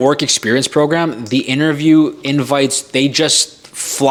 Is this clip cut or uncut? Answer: uncut